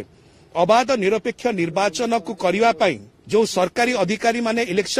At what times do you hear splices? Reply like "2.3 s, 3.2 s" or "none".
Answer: 3.1 s